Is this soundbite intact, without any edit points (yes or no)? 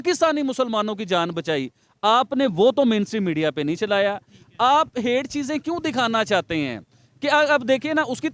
yes